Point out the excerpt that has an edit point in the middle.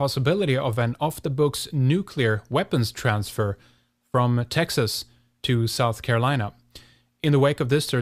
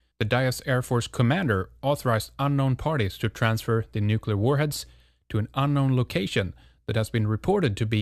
second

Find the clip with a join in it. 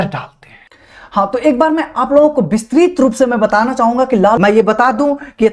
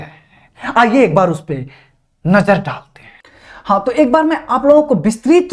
first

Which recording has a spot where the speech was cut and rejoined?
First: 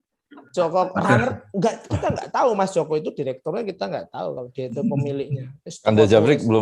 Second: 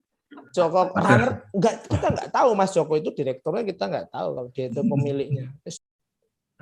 second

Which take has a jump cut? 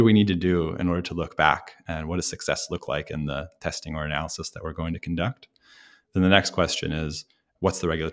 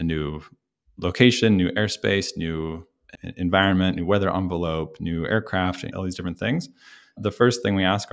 first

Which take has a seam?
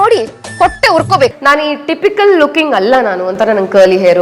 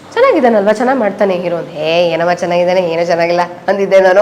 first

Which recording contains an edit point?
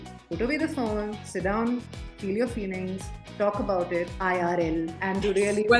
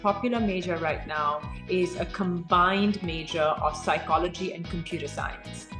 first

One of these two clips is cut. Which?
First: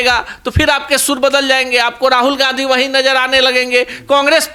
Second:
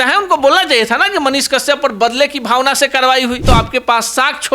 second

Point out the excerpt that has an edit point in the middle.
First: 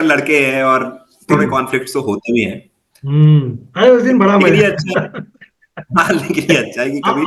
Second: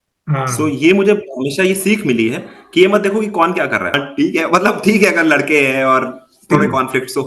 second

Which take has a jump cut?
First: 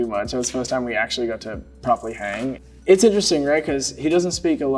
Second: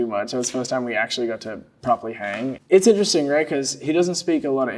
second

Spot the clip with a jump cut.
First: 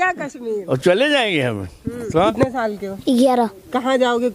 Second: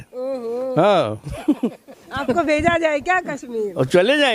first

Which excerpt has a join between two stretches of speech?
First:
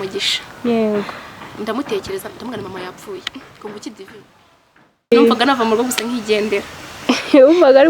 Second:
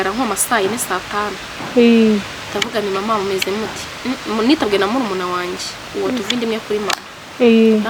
first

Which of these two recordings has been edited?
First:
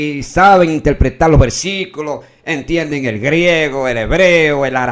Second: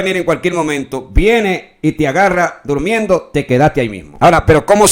second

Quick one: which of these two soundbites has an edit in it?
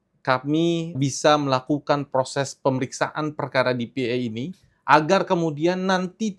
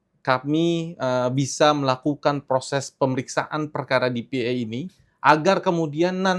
first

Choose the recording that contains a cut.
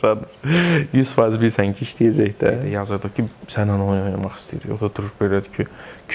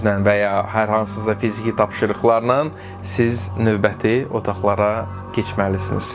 first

